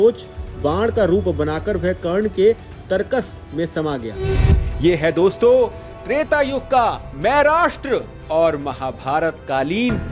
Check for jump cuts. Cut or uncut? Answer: uncut